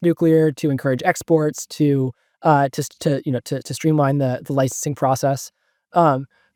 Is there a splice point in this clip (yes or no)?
no